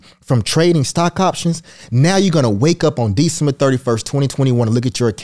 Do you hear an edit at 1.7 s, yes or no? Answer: no